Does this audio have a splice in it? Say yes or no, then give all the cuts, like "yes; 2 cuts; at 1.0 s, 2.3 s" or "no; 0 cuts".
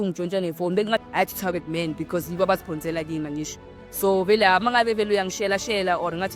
yes; 1 cut; at 1.0 s